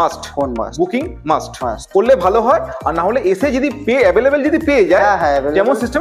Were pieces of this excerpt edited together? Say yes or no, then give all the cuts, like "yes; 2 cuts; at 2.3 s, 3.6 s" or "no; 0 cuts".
no; 0 cuts